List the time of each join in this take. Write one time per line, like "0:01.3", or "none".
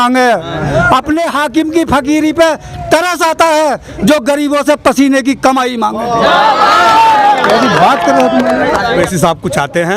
0:09.1